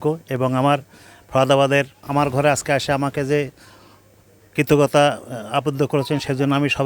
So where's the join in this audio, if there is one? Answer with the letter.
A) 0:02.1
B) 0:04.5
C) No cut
A